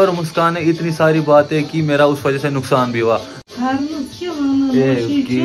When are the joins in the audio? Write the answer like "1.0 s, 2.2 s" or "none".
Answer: 3.3 s